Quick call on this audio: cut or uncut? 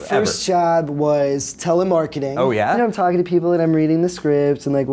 cut